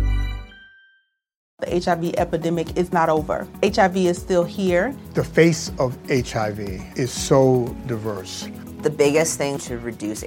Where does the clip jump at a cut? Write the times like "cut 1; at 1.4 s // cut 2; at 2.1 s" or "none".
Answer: cut 1; at 1.5 s